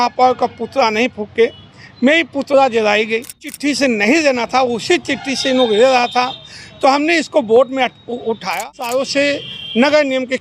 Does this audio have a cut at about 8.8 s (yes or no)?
yes